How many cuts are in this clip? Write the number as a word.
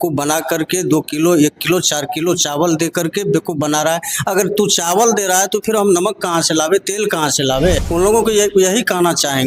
one